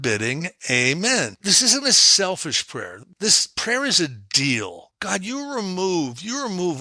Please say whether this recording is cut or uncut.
cut